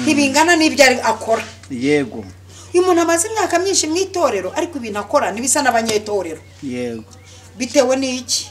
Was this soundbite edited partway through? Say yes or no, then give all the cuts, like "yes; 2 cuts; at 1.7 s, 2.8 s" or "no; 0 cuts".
no; 0 cuts